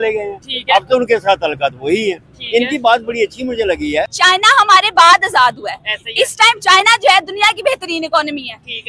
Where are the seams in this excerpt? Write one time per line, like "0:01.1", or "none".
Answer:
0:04.1